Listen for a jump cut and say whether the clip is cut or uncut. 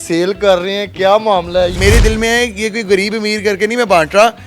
cut